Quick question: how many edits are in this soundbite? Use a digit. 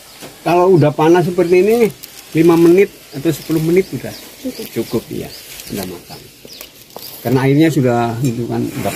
0